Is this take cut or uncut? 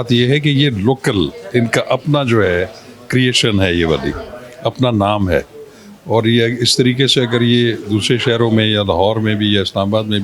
uncut